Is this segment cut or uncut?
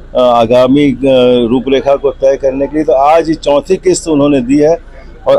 uncut